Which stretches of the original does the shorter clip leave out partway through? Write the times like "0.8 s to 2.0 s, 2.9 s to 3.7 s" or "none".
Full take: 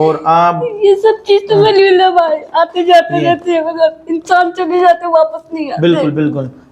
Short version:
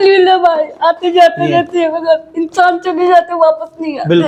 none